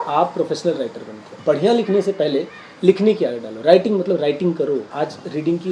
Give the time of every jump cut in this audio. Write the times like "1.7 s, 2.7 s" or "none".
1.3 s, 4.9 s